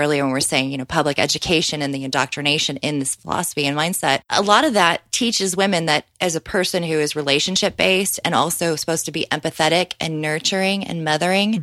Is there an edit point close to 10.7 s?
no; 1 cut; at 4.3 s

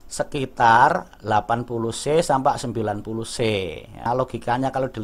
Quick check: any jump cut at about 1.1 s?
no; 1 cut; at 4.1 s

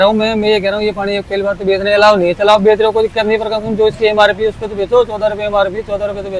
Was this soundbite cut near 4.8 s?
no; 0 cuts

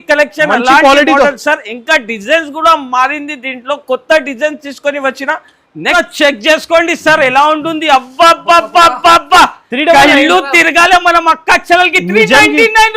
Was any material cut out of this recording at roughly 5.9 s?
yes; 1 cut; at 5.9 s

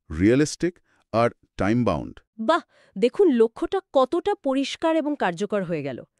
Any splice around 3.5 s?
no; 0 cuts

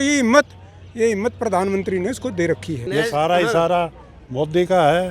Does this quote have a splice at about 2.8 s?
yes; 1 cut; at 2.8 s

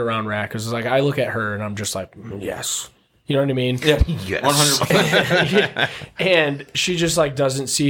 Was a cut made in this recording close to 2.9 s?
no; 0 cuts

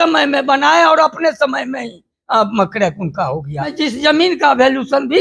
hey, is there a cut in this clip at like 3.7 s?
yes; 1 cut; at 3.7 s

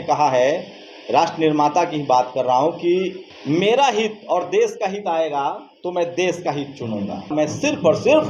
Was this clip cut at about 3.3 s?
yes; 2 cuts; at 3.3 s, 7.3 s

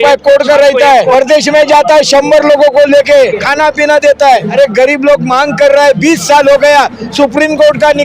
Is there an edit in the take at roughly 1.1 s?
yes; 3 cuts; at 1.1 s, 3.4 s, 4.5 s

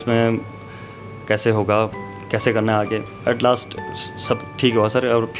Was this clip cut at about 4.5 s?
no; 1 cut; at 3.1 s

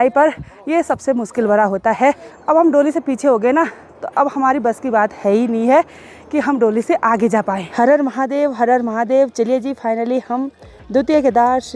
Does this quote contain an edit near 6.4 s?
no; 2 cuts; at 2.3 s, 7.7 s

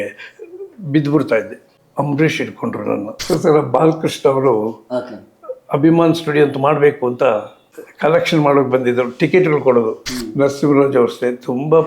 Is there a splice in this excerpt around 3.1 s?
yes; 2 cuts; at 3.1 s, 10.0 s

